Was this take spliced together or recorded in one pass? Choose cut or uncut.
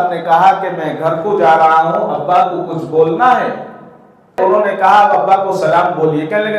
cut